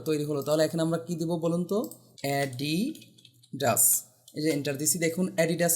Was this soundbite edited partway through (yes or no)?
yes